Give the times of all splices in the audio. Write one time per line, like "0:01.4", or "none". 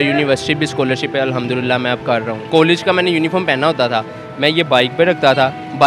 0:02.3